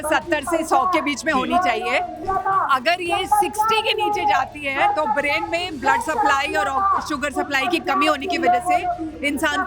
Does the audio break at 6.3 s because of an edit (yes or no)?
no